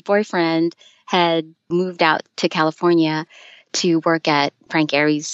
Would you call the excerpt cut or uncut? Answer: cut